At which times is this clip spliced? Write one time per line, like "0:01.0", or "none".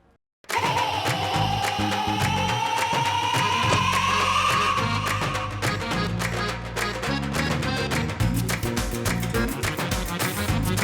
none